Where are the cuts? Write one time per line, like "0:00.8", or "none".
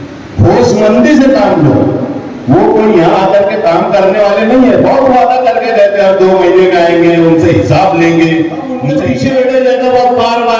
0:08.8